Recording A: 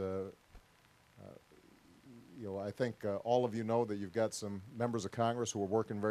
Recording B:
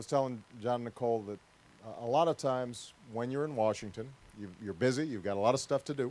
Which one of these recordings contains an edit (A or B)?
A